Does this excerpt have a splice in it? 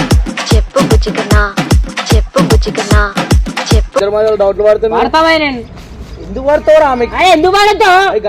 yes; 1 cut; at 4.0 s

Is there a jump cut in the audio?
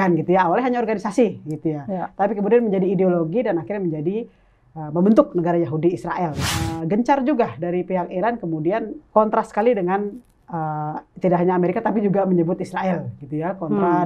yes; 1 cut; at 6.4 s

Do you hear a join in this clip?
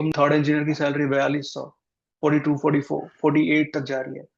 no; 0 cuts

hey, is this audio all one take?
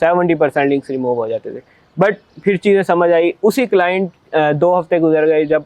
yes; 0 cuts

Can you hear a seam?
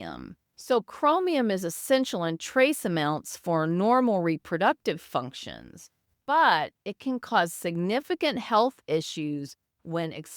yes; 1 cut; at 6.1 s

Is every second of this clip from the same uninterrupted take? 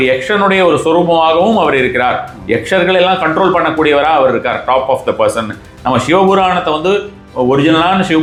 yes; 0 cuts

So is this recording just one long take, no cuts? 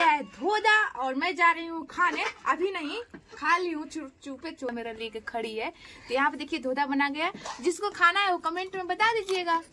no; 1 cut; at 4.7 s

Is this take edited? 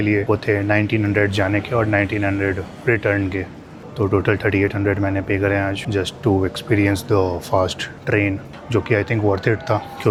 no; 0 cuts

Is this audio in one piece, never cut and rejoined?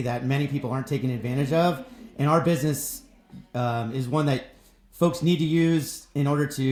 yes; 0 cuts

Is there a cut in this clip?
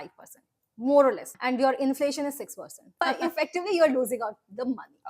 yes; 2 cuts; at 1.3 s, 3.0 s

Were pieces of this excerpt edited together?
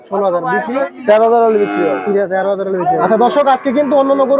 yes; 1 cut; at 3.0 s

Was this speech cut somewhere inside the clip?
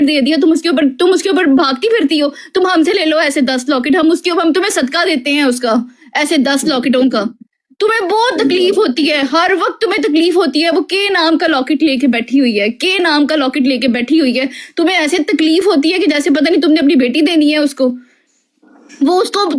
no; 0 cuts

